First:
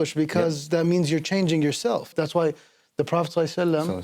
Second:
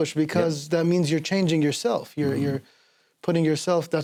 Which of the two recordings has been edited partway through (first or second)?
first